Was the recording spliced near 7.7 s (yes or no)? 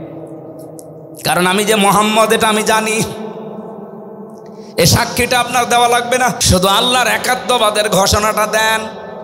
no